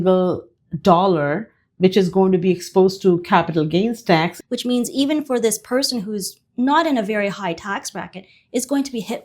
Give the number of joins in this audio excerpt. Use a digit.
1